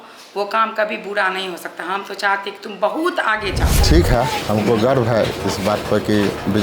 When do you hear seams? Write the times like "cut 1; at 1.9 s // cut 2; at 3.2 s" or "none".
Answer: cut 1; at 3.8 s